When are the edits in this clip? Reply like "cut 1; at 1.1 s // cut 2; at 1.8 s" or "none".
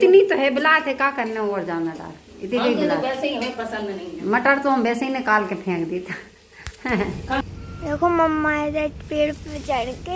cut 1; at 7.4 s